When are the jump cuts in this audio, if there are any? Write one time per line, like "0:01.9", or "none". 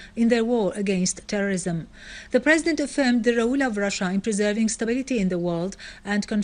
none